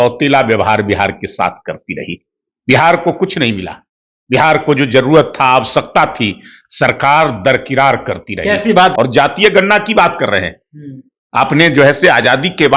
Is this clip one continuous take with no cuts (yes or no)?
no